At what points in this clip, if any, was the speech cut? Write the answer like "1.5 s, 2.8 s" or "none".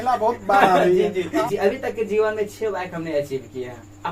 1.4 s